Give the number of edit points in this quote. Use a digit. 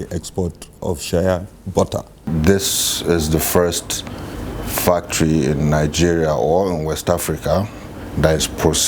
1